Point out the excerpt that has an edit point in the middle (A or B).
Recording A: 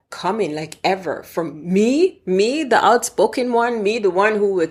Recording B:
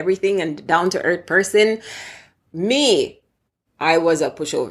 B